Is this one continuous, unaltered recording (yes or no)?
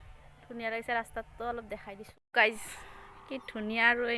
no